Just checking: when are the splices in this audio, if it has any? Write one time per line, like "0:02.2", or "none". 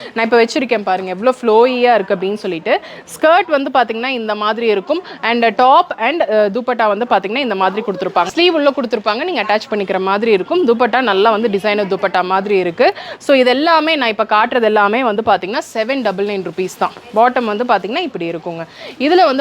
0:08.3